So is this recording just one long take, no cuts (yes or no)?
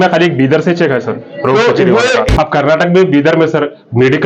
no